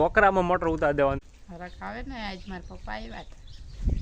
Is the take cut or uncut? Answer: cut